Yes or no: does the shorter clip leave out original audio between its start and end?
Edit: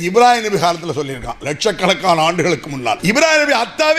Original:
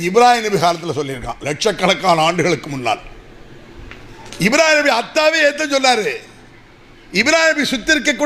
yes